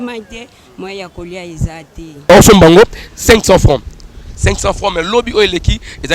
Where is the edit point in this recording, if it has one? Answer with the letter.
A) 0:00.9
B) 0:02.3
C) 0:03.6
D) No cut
B